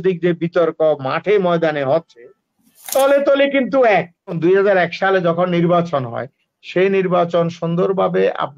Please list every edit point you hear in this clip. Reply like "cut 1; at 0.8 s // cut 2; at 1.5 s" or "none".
cut 1; at 4.3 s